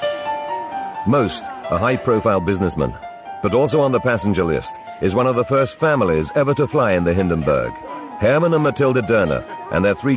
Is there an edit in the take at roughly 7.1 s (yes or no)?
no